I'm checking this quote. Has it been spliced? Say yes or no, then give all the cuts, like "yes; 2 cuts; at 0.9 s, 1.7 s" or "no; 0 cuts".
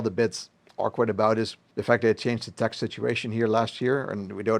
yes; 1 cut; at 1.6 s